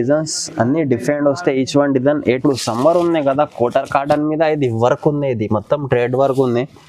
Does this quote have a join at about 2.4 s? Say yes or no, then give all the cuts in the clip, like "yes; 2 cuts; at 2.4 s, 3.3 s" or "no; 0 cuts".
yes; 1 cut; at 2.4 s